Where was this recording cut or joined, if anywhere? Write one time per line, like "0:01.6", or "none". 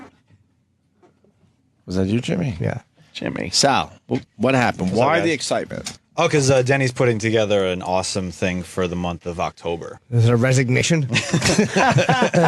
0:11.1

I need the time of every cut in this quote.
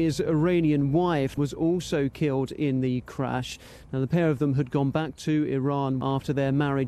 0:01.3
0:06.0

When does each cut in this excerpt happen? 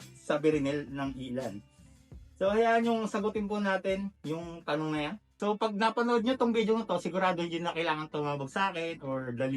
0:05.4

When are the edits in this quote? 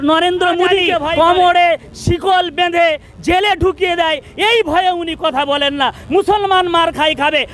0:01.1

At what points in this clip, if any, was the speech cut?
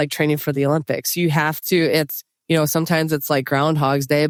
none

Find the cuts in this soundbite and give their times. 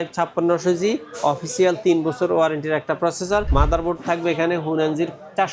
0:03.5

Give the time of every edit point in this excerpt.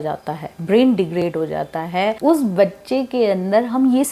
0:02.2

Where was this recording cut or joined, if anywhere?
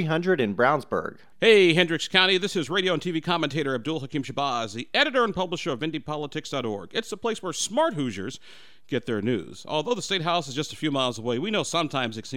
0:01.2

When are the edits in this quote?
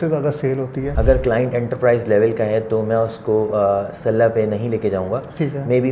0:00.9

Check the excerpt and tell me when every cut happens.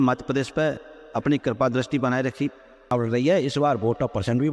0:02.9

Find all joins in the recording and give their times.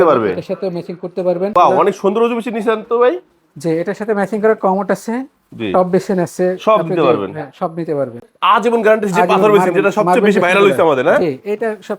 0:01.5
0:08.3

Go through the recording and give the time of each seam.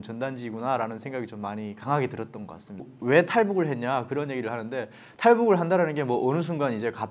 0:02.9

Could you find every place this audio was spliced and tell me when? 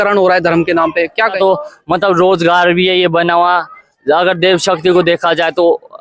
0:01.4

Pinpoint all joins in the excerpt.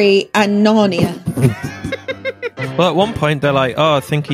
0:02.5

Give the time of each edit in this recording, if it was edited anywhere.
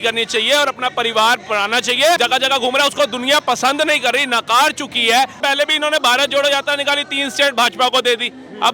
0:02.2
0:05.4

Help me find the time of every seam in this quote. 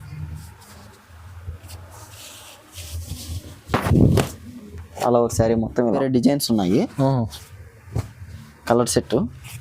0:06.0

